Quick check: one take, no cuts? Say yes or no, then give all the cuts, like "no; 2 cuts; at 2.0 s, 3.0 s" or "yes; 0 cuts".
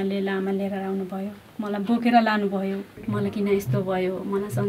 no; 1 cut; at 2.9 s